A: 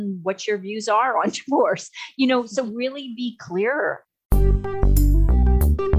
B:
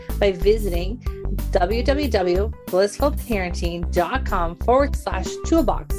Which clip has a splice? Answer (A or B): A